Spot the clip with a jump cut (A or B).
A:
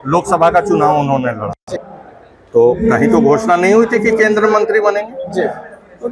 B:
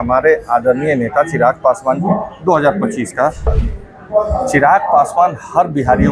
B